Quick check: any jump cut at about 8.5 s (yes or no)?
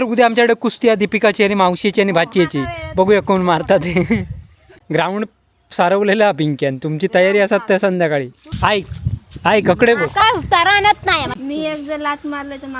yes